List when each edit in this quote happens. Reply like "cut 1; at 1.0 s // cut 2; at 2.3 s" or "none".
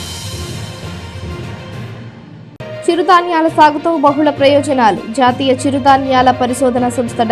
cut 1; at 2.7 s